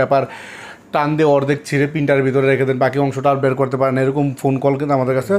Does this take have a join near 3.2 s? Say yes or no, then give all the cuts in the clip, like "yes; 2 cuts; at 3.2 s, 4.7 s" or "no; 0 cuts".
no; 0 cuts